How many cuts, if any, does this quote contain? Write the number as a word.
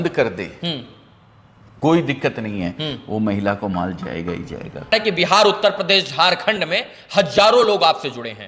one